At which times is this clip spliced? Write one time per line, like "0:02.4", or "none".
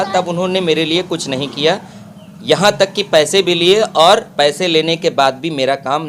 none